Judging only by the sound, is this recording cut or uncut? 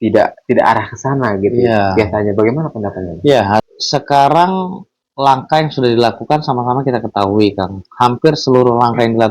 cut